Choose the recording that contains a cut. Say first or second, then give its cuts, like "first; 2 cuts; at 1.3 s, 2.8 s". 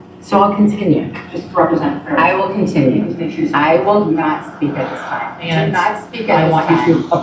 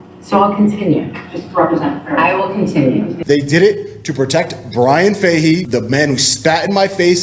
second; 2 cuts; at 3.1 s, 5.6 s